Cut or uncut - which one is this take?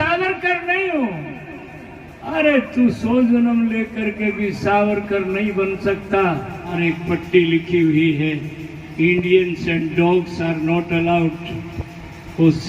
cut